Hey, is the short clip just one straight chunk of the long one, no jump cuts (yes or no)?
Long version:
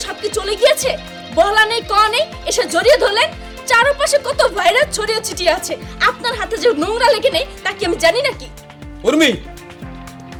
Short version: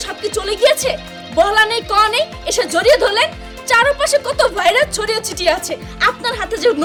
yes